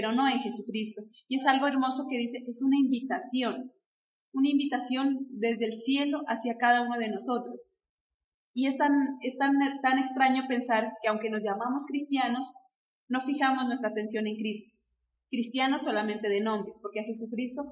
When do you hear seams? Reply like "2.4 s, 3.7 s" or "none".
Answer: none